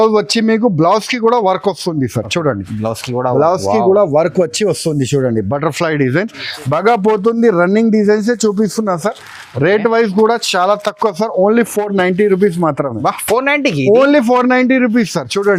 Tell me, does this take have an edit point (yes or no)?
no